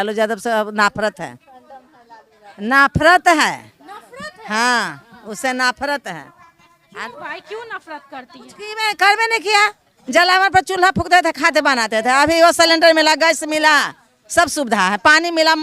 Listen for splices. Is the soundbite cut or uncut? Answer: uncut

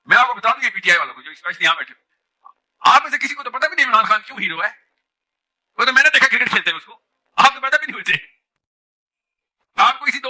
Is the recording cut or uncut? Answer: uncut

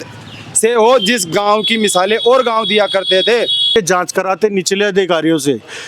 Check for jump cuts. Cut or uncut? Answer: cut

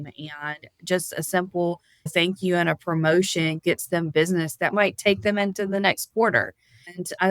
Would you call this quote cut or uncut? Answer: cut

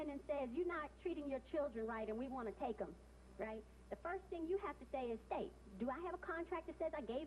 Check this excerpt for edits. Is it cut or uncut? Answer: uncut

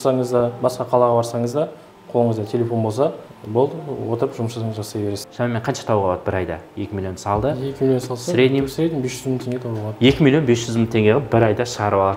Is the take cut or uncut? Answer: cut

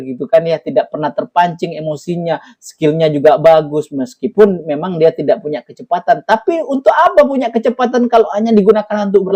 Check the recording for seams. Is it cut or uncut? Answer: uncut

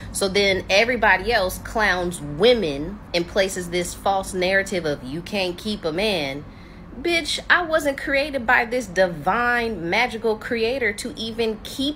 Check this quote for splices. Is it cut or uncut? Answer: uncut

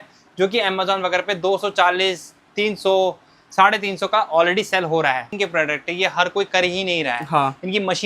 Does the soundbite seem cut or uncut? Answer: cut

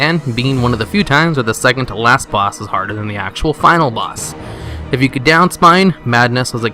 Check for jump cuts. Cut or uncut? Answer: uncut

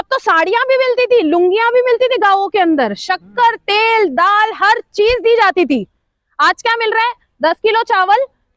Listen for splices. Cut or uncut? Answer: uncut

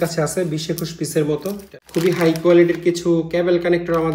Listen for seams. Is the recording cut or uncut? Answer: cut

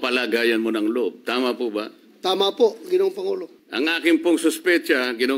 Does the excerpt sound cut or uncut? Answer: cut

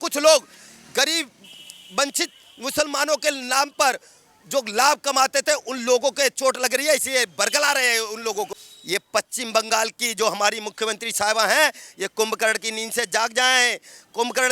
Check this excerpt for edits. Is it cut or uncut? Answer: cut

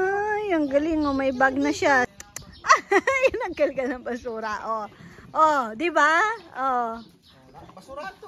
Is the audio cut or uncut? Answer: cut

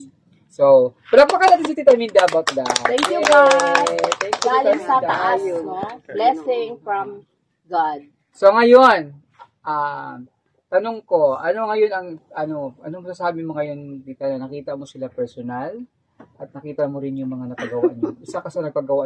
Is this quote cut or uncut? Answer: uncut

